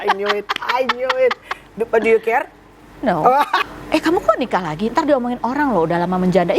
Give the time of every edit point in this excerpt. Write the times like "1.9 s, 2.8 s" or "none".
3.6 s